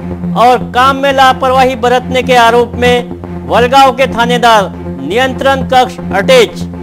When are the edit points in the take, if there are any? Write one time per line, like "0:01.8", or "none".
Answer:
none